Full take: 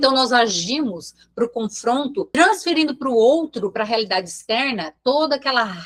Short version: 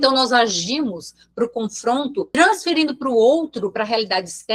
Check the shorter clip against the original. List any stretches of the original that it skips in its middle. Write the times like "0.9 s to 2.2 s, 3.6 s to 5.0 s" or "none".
none